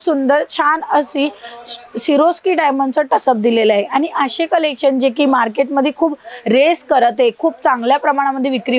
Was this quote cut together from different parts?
no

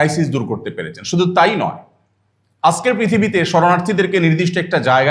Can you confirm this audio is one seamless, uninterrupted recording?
yes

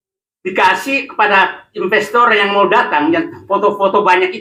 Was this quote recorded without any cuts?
yes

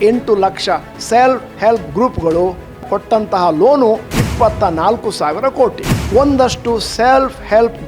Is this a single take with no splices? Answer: no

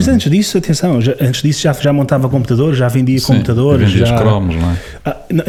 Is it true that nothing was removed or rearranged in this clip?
yes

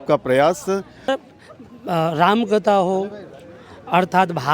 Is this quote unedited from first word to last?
no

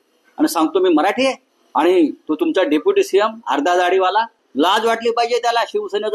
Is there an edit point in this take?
yes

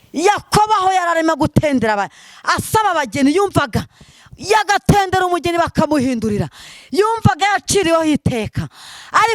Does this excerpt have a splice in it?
no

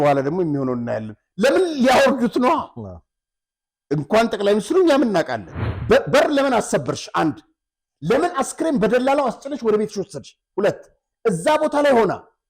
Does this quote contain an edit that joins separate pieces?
yes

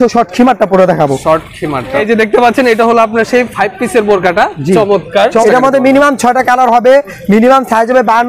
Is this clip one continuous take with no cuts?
no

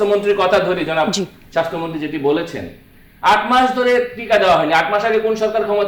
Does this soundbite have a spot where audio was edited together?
no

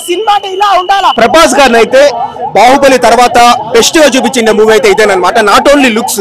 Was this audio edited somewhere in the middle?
yes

